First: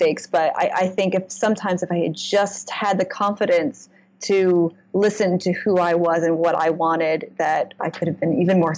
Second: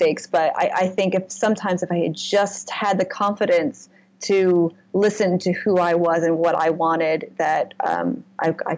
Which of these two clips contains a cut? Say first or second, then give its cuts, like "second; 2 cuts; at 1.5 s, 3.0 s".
first; 1 cut; at 7.7 s